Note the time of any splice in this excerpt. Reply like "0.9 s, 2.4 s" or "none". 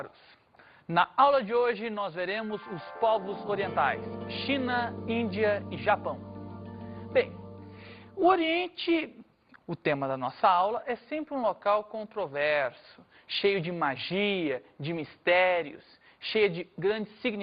12.7 s